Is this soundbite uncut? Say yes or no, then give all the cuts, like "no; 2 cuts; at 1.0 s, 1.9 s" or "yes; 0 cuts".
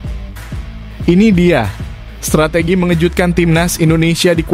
no; 1 cut; at 1.1 s